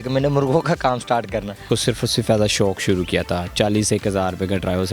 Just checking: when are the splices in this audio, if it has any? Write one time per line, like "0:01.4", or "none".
0:01.6

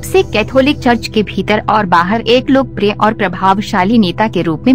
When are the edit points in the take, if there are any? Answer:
none

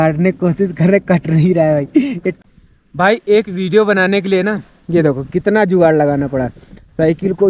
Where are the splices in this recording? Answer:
0:02.4

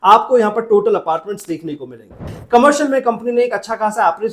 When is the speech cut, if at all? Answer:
0:02.2

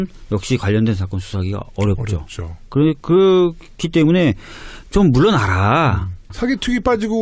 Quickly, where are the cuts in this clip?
none

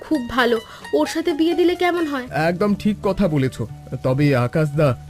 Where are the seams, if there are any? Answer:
0:02.3

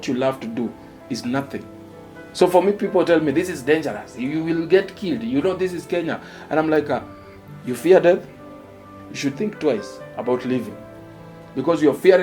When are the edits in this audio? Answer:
none

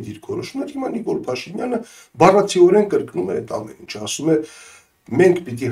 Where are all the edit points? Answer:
none

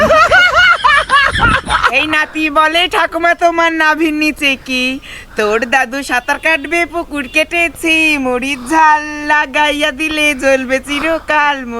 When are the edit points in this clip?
0:01.9

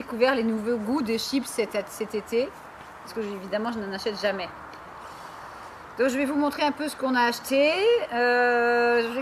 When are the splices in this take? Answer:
0:05.3

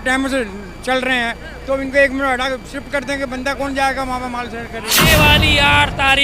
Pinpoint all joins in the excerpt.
0:05.0

